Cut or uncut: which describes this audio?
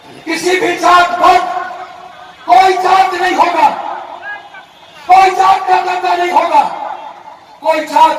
uncut